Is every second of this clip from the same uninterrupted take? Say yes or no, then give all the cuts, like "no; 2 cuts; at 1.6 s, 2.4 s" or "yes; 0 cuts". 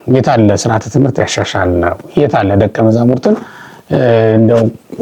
yes; 0 cuts